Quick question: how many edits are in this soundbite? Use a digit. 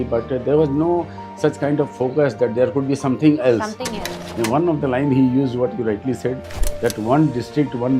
1